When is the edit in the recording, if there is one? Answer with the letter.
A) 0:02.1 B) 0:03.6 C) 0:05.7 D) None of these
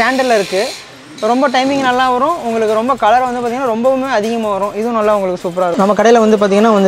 C